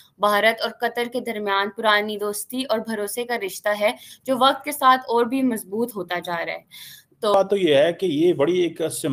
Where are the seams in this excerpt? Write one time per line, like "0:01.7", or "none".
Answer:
0:07.3